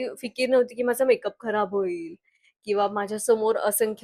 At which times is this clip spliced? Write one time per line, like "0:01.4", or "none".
none